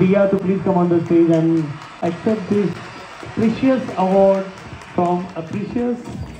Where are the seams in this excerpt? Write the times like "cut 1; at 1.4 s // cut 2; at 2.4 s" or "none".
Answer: none